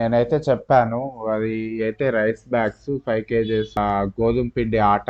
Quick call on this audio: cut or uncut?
cut